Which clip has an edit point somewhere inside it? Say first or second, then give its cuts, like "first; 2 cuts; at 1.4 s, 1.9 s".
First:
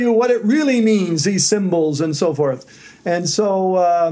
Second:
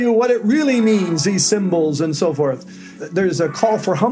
second; 1 cut; at 2.9 s